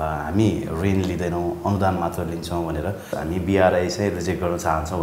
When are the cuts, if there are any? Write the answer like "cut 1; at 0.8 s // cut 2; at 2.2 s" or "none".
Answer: cut 1; at 3.1 s